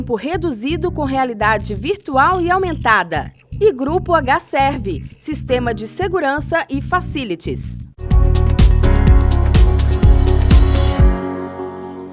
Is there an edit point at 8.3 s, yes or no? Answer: yes